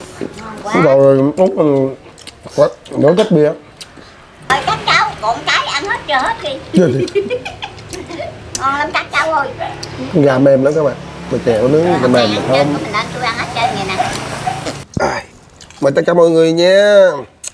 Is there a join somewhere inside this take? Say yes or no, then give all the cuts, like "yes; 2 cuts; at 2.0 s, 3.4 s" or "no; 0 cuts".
yes; 1 cut; at 14.7 s